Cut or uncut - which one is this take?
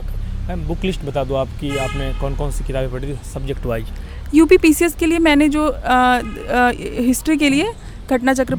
uncut